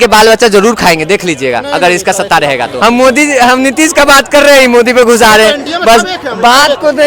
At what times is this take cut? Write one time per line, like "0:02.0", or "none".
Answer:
0:02.7